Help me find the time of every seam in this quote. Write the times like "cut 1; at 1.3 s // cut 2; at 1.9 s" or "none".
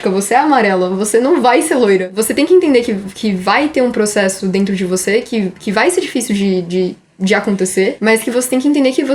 cut 1; at 2.1 s // cut 2; at 8.0 s